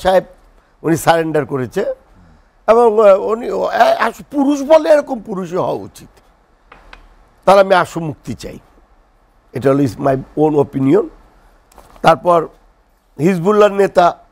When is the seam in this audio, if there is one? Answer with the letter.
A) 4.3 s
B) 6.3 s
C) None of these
C